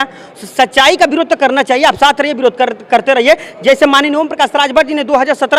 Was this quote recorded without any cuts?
yes; 0 cuts

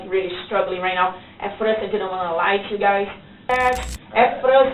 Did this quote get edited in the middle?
yes; 1 cut; at 3.5 s

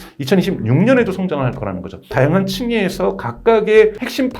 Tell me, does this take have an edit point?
yes; 1 cut; at 2.1 s

